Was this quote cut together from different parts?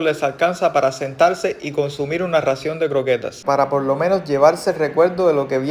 yes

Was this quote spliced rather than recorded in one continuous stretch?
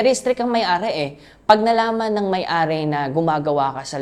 no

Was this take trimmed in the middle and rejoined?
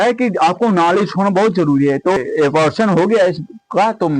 yes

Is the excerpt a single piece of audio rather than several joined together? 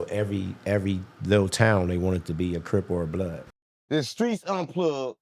no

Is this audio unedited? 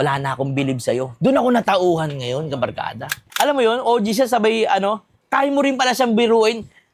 no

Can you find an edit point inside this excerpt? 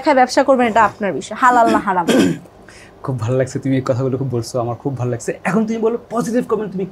no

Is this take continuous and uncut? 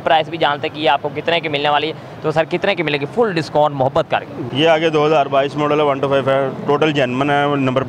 no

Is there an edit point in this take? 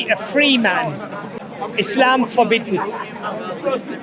yes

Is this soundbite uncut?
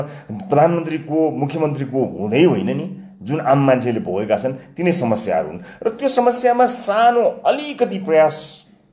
yes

